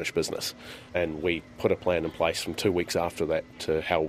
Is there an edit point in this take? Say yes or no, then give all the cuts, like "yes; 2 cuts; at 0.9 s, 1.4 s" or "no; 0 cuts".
yes; 1 cut; at 0.9 s